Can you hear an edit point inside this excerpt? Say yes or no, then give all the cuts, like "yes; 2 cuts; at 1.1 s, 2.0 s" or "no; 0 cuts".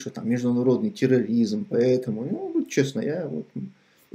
no; 0 cuts